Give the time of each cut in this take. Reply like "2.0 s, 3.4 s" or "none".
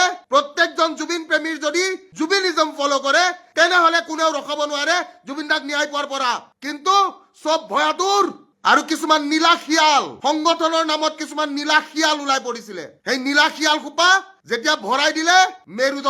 none